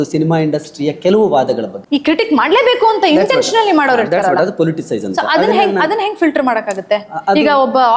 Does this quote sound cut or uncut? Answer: cut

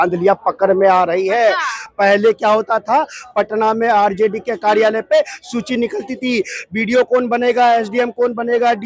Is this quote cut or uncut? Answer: uncut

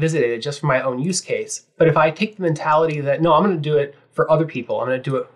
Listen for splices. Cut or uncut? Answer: uncut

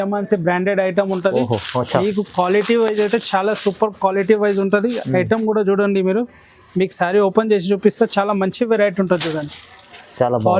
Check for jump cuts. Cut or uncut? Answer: uncut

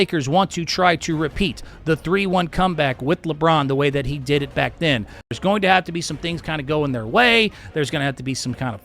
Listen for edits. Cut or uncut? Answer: cut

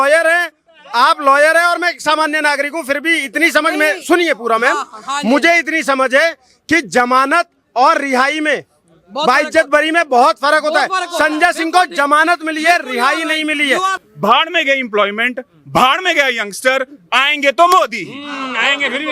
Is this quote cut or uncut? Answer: cut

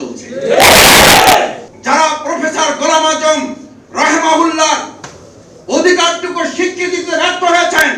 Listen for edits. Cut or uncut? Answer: cut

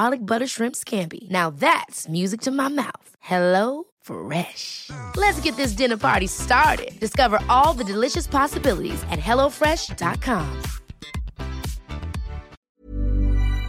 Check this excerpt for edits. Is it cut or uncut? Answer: cut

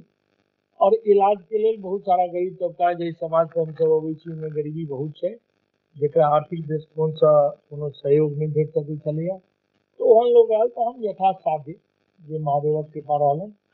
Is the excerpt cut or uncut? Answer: uncut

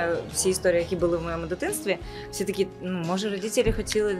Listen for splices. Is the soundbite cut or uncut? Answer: uncut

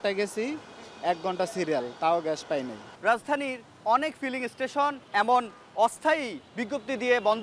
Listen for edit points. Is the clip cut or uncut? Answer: cut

